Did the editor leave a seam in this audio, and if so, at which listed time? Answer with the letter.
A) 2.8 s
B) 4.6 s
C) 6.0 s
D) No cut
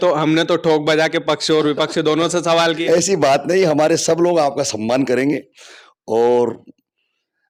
D